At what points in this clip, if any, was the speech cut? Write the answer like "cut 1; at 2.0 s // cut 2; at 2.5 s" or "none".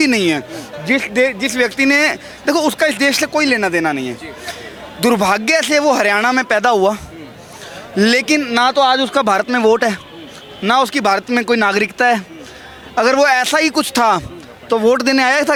none